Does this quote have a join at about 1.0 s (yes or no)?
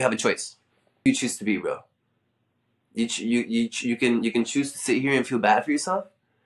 yes